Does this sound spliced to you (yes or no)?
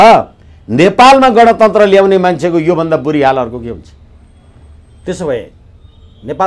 no